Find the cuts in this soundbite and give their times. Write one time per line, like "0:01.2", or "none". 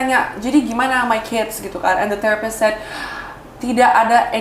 none